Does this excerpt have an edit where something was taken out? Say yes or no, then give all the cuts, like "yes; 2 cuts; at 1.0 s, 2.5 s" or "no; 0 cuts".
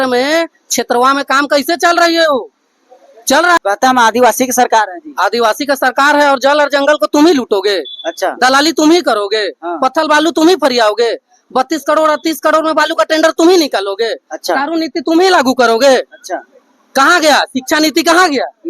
yes; 1 cut; at 3.6 s